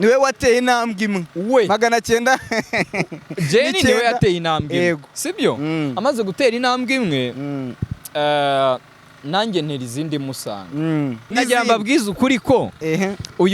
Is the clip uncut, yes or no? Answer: no